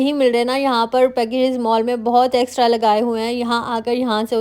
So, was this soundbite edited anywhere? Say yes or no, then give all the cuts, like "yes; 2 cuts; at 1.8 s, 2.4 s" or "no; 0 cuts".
no; 0 cuts